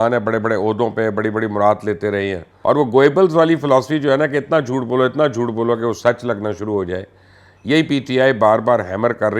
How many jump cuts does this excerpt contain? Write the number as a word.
one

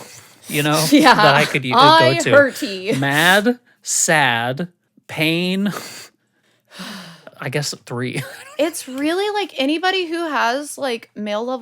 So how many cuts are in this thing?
one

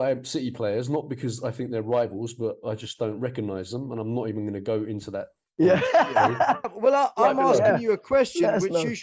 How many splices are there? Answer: one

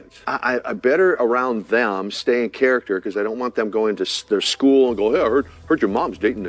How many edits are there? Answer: zero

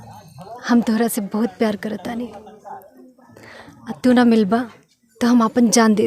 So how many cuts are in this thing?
zero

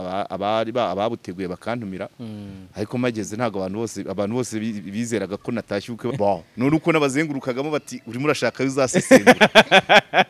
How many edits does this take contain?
one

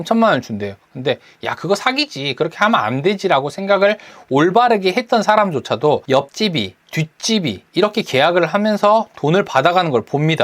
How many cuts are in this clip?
two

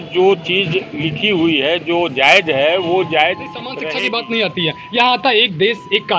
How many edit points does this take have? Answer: one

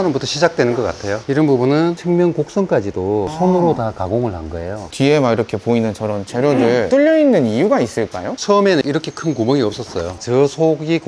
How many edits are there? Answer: zero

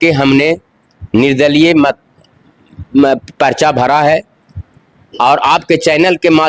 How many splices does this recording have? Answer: zero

